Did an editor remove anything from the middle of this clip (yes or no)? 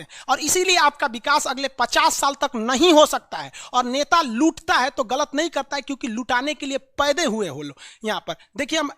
no